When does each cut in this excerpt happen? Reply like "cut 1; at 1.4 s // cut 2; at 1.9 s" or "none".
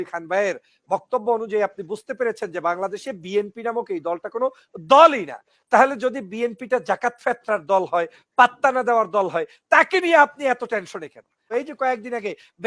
cut 1; at 11.5 s